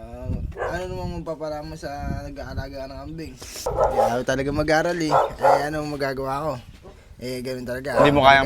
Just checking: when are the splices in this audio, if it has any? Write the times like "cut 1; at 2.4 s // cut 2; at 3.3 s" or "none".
cut 1; at 3.7 s